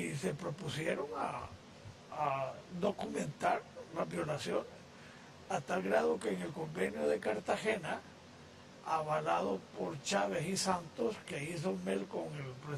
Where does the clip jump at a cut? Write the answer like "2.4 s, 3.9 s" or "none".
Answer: 9.4 s